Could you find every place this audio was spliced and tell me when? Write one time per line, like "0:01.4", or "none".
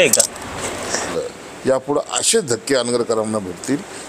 0:01.1

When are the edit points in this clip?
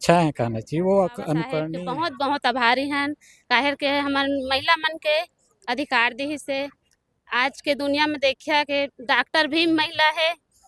0:01.8

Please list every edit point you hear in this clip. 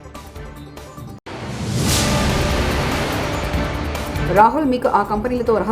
0:04.1

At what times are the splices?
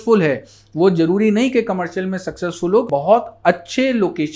0:02.9

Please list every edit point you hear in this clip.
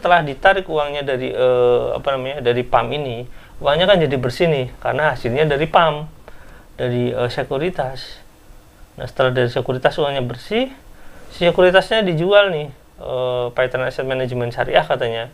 none

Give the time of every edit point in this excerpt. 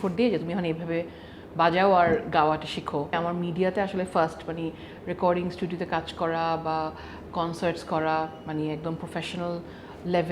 0:03.1

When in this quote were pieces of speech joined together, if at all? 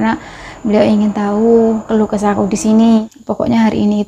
0:03.1

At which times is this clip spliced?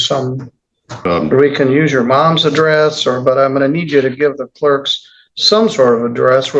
0:01.0

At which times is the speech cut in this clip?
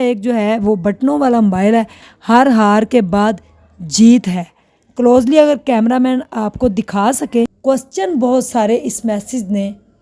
0:02.1
0:07.6

